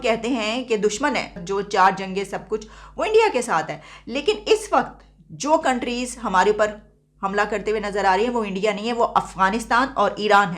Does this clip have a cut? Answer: yes; 1 cut; at 1.3 s

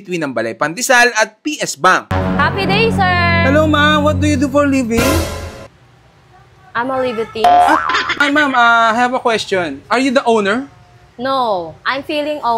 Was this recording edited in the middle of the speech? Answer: no; 0 cuts

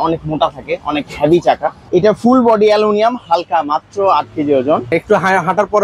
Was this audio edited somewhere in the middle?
yes; 2 cuts; at 1.8 s, 4.9 s

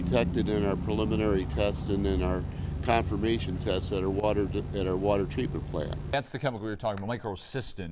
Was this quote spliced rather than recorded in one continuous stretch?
no; 0 cuts

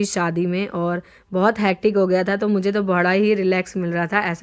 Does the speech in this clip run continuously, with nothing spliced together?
yes; 0 cuts

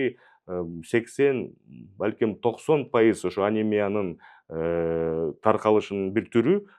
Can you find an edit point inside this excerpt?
no; 0 cuts

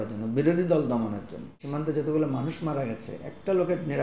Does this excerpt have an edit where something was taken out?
yes; 1 cut; at 1.6 s

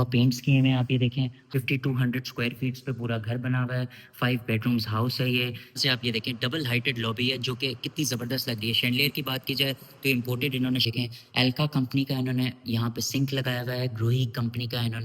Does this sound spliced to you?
yes; 3 cuts; at 1.5 s, 5.8 s, 10.9 s

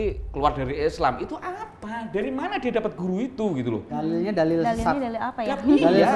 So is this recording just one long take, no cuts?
yes; 0 cuts

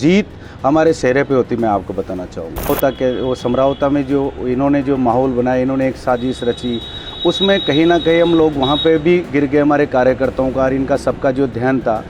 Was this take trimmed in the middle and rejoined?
yes; 1 cut; at 2.7 s

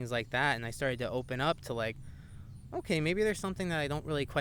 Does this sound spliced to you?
no; 0 cuts

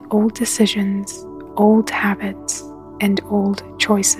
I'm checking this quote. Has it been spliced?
no; 0 cuts

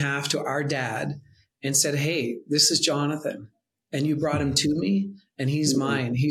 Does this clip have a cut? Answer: no; 0 cuts

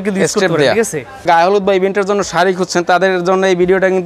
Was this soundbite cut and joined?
yes; 1 cut; at 1.2 s

